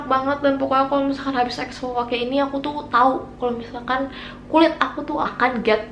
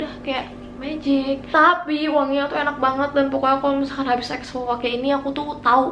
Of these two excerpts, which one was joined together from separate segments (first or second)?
second